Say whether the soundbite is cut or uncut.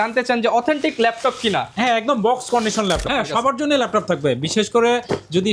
cut